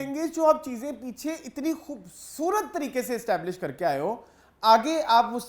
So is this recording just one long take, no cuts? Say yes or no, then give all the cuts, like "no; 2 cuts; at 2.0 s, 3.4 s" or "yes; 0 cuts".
yes; 0 cuts